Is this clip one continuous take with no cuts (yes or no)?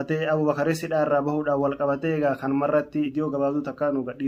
yes